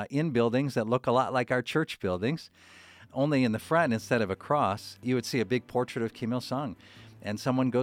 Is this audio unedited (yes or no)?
no